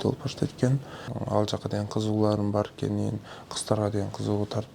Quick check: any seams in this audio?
yes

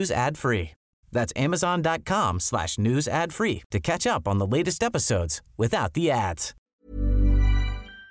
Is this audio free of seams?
no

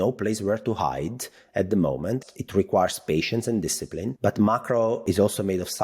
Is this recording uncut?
no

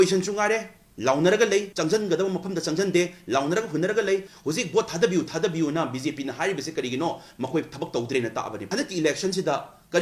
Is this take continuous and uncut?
no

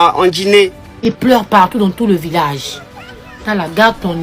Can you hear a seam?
yes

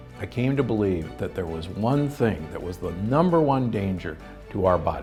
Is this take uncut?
yes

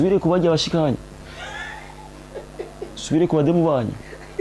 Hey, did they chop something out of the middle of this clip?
no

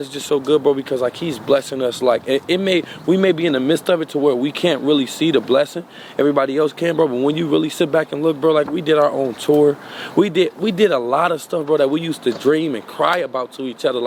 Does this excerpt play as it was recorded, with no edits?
yes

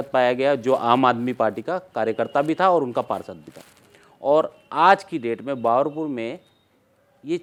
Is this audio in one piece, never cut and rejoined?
yes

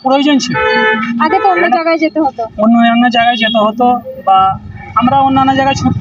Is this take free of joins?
yes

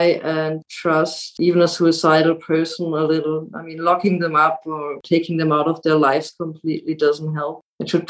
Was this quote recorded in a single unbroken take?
no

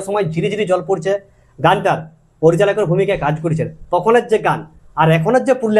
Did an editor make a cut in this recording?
no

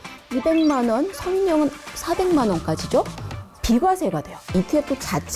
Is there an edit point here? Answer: yes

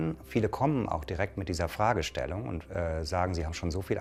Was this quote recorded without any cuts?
yes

